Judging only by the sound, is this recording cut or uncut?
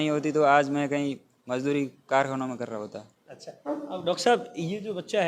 uncut